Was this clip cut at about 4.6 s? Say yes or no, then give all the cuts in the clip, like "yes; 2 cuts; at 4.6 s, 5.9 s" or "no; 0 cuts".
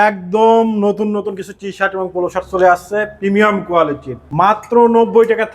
yes; 1 cut; at 4.6 s